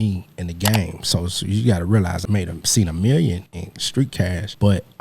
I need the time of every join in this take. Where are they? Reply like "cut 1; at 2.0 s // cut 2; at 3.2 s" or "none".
cut 1; at 2.2 s // cut 2; at 4.0 s